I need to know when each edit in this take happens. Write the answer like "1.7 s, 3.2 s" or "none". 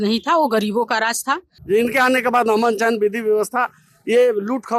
1.5 s